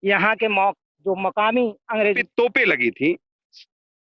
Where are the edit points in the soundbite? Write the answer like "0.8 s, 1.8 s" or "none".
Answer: 2.2 s